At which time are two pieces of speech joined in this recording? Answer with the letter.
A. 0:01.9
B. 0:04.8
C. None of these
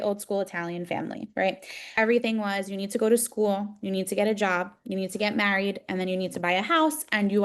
A